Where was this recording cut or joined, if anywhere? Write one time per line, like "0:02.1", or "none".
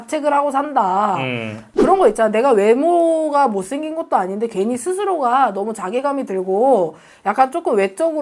0:01.6